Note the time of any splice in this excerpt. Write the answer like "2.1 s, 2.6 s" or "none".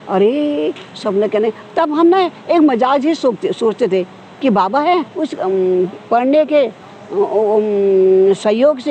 5.2 s

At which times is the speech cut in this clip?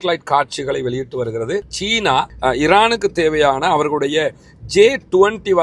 1.8 s

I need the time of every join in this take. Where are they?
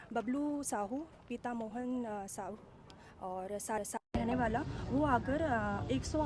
none

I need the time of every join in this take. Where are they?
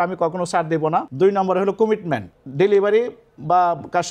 1.1 s, 2.4 s

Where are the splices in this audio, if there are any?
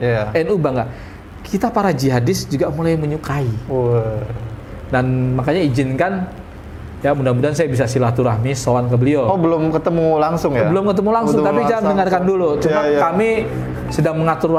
none

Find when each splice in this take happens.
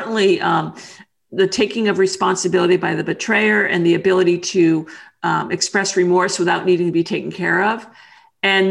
none

